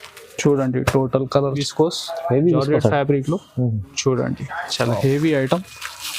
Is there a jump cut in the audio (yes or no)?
yes